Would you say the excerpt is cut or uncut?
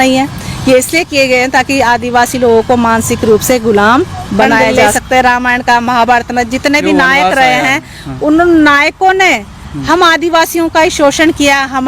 cut